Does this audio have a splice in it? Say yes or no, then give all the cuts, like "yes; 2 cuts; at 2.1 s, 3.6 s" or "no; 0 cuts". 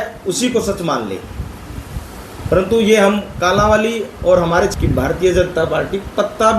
yes; 1 cut; at 4.7 s